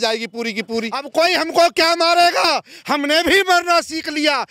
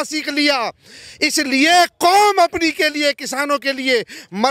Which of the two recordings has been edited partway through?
first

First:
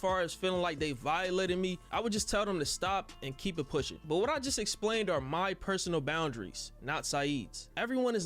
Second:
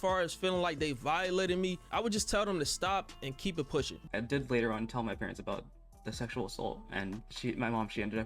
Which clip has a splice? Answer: second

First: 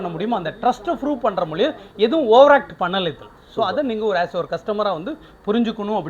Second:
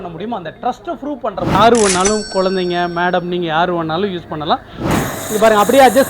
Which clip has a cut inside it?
second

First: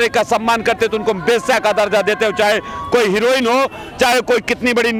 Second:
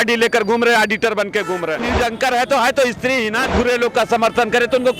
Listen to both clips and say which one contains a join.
second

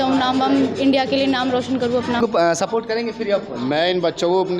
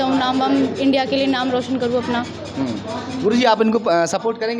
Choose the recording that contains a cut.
first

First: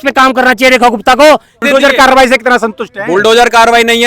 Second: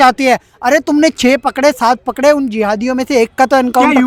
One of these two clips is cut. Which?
first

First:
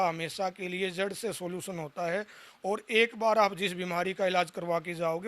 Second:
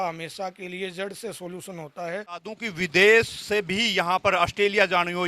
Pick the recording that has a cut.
second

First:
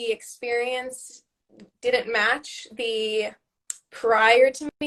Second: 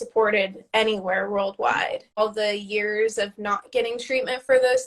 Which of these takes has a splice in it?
second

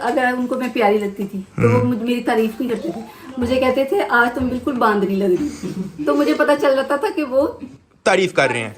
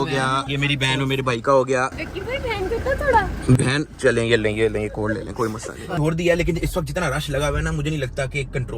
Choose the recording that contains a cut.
second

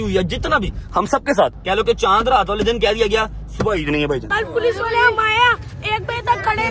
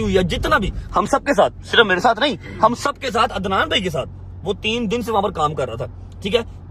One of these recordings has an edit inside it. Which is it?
first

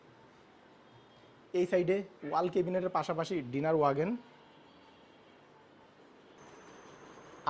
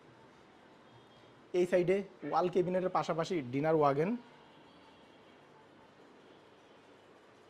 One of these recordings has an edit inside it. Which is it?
first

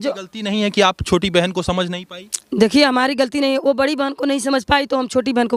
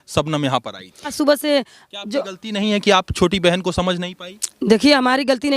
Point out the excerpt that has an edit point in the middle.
second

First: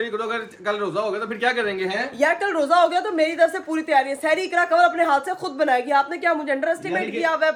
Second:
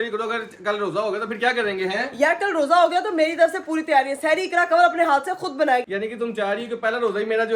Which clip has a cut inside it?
second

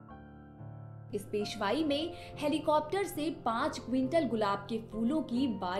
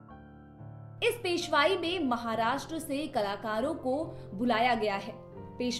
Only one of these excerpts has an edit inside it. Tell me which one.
first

